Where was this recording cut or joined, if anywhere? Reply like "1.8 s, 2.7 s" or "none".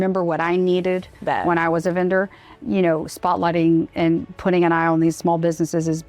1.1 s, 2.6 s